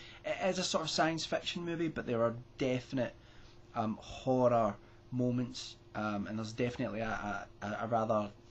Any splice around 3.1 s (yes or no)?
yes